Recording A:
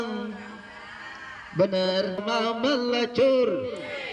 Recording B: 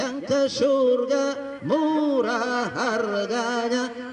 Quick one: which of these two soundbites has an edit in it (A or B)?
A